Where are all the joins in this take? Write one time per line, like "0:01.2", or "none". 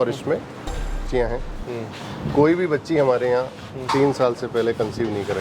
0:01.0